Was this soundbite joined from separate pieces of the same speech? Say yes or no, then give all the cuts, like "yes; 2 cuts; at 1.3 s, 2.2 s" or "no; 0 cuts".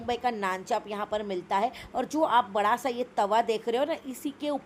no; 0 cuts